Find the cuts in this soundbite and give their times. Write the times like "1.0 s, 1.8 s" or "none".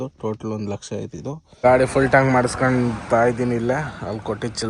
1.6 s